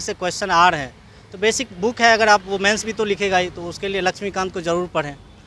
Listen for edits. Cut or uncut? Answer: uncut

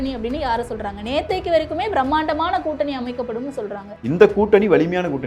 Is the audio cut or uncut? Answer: cut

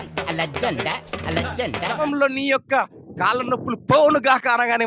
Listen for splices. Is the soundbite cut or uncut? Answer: cut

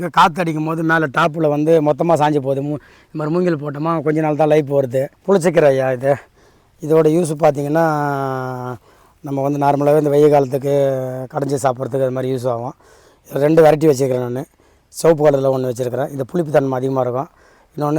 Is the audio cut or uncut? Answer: cut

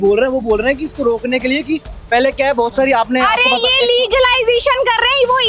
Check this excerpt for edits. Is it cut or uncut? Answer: uncut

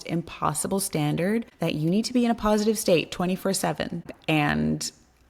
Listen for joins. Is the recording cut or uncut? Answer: cut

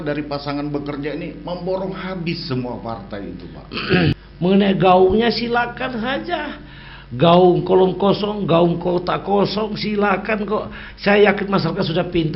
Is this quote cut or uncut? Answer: cut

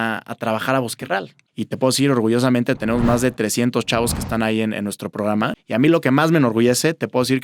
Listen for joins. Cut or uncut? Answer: cut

